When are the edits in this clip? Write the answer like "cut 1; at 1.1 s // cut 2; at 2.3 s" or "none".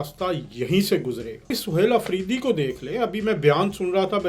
cut 1; at 1.6 s